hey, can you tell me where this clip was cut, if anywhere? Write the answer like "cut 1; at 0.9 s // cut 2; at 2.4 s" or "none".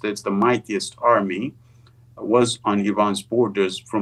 none